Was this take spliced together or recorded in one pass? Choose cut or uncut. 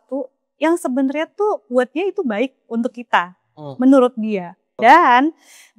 cut